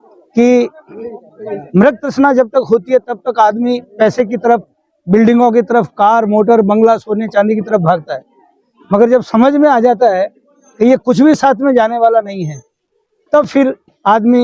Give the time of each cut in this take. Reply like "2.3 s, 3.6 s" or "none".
none